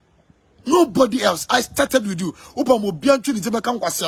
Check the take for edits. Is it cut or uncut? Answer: uncut